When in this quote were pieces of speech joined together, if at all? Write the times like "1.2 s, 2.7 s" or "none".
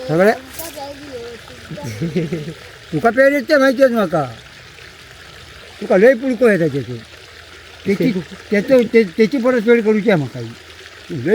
5.7 s